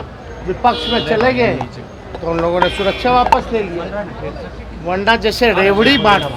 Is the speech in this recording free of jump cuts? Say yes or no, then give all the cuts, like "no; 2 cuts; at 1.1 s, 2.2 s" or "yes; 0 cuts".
yes; 0 cuts